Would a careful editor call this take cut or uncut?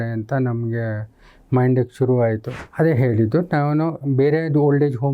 cut